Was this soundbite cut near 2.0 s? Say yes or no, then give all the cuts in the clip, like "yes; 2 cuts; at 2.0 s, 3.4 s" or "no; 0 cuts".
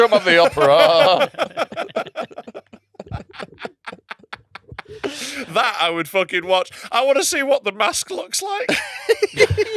no; 0 cuts